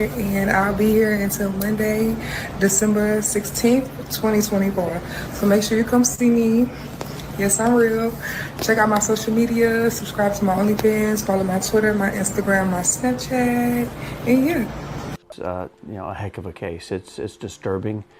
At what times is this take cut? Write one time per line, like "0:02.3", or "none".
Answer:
0:15.2